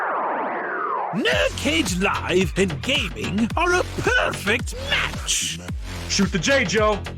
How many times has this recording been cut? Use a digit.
1